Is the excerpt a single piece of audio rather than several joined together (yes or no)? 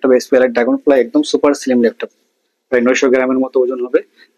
yes